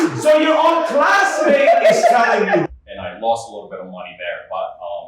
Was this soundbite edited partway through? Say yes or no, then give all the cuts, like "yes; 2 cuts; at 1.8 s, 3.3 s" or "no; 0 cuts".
yes; 1 cut; at 2.7 s